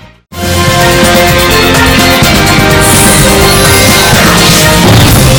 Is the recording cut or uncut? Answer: uncut